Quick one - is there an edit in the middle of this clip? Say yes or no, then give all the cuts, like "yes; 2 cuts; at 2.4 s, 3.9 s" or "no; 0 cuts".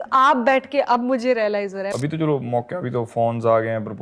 yes; 1 cut; at 1.9 s